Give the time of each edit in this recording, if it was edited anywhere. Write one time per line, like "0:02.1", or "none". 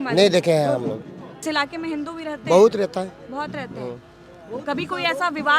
0:01.4